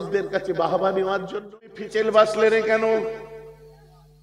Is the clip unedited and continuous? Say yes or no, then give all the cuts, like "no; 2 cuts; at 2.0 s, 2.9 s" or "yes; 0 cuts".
no; 1 cut; at 1.8 s